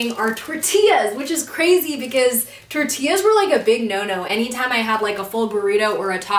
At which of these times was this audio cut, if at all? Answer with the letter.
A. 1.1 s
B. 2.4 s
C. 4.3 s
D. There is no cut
D